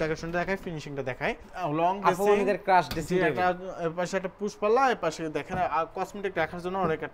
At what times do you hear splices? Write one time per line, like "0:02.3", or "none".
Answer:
0:01.5